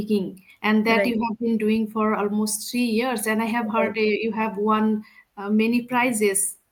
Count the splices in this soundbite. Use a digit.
0